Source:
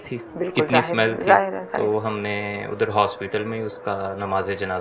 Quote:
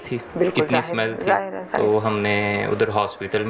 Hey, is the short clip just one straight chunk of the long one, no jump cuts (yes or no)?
yes